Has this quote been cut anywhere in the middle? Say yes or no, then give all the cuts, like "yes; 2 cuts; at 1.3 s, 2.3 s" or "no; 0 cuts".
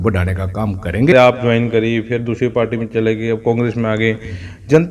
yes; 1 cut; at 1.1 s